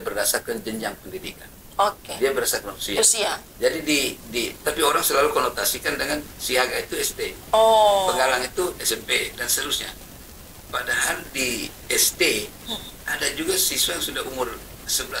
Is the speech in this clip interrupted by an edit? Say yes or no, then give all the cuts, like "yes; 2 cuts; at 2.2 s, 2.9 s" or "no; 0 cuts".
no; 0 cuts